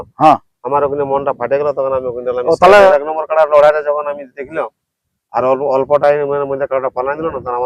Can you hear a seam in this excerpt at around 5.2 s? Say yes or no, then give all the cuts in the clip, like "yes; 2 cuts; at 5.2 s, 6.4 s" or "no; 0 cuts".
no; 1 cut; at 2.9 s